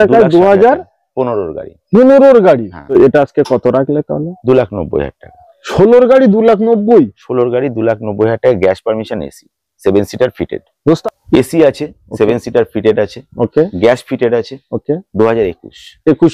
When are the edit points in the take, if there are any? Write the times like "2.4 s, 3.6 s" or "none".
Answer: 2.8 s, 11.0 s